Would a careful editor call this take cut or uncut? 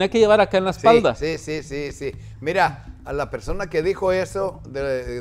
uncut